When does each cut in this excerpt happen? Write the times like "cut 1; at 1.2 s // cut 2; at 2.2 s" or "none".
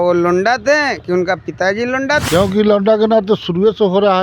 cut 1; at 2.2 s